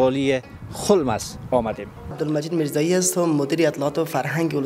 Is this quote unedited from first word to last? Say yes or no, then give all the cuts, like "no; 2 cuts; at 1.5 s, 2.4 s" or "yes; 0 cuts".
no; 1 cut; at 2.1 s